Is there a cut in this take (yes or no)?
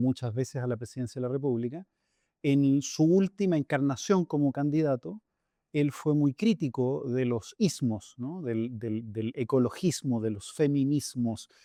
no